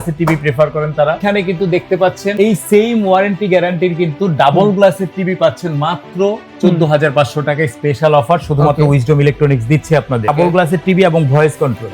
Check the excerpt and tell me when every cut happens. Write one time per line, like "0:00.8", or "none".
0:01.2
0:02.3
0:10.3

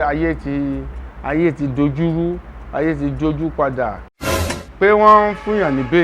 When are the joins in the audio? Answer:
0:04.1

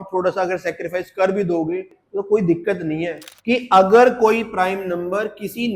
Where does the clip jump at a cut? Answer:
0:02.0
0:03.2

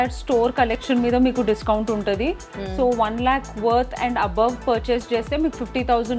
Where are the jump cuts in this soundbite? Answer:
none

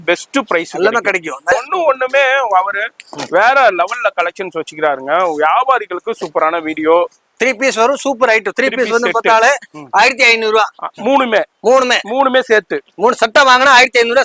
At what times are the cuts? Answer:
0:01.5
0:07.2

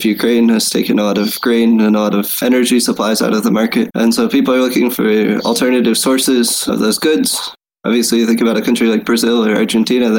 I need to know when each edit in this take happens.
0:02.4
0:03.9

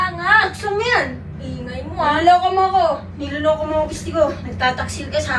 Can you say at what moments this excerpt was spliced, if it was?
none

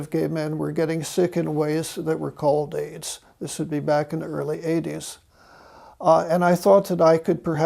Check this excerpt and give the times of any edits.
0:06.1

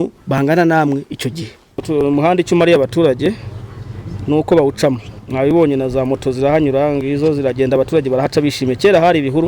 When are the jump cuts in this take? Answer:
0:01.8

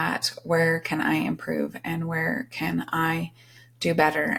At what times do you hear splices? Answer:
none

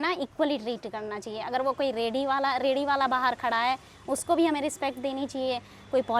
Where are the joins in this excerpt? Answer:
none

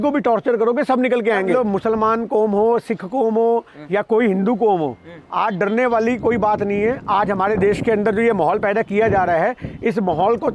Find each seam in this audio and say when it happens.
0:01.5

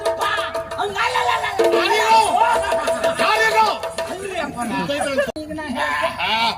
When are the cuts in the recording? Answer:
0:05.4

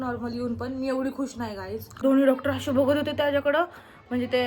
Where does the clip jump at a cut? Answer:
0:02.0

